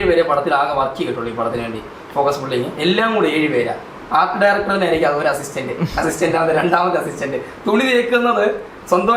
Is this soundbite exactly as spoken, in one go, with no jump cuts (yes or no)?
yes